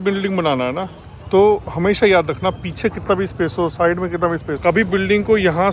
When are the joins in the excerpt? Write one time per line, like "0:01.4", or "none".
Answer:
0:04.6